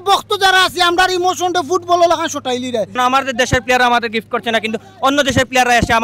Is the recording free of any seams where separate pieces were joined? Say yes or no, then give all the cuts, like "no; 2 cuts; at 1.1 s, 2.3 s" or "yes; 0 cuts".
no; 1 cut; at 2.9 s